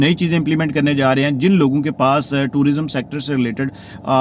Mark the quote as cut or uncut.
uncut